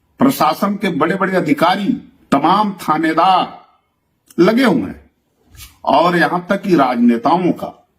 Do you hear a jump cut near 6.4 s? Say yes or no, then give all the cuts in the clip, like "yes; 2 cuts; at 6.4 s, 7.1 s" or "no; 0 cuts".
no; 1 cut; at 2.1 s